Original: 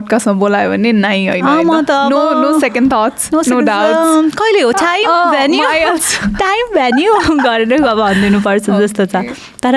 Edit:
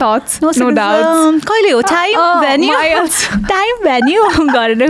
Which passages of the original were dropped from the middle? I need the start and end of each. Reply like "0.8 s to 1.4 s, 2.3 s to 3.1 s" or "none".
none